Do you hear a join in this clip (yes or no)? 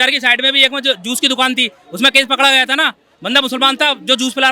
no